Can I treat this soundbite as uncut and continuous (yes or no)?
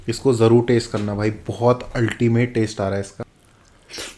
no